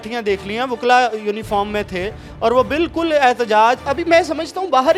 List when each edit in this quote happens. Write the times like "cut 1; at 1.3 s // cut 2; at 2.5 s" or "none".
none